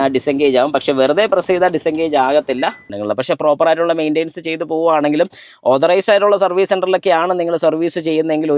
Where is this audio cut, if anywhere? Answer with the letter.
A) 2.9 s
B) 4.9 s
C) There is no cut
A